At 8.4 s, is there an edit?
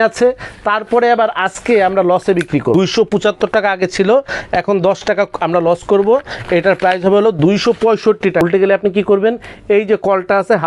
yes; 2 cuts; at 2.7 s, 8.4 s

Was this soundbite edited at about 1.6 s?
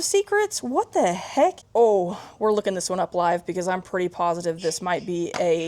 yes; 1 cut; at 1.6 s

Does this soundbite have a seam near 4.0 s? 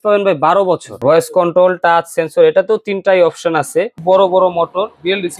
yes; 2 cuts; at 1.0 s, 4.0 s

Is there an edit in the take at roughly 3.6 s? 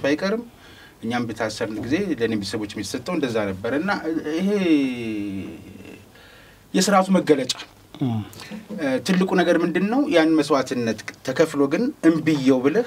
no; 0 cuts

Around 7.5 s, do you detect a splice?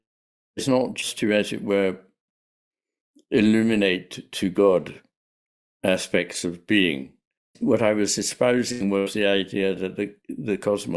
yes; 1 cut; at 7.5 s

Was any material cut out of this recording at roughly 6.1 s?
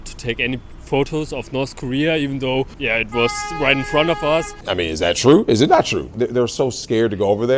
yes; 2 cuts; at 4.6 s, 6.1 s

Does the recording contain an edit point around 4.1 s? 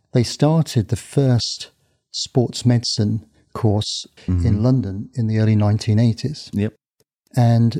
yes; 1 cut; at 4.1 s

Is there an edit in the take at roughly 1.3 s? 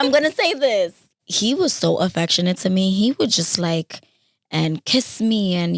yes; 1 cut; at 1.3 s

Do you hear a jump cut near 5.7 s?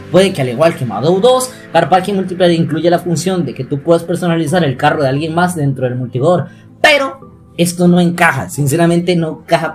no; 0 cuts

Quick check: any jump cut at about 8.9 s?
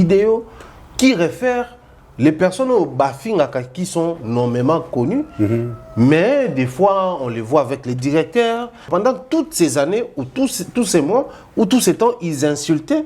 yes; 1 cut; at 8.9 s

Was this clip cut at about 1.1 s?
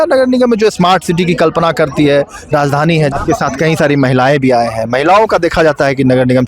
no; 1 cut; at 3.1 s

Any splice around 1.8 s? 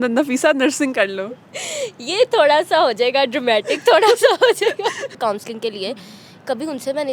no; 1 cut; at 5.2 s

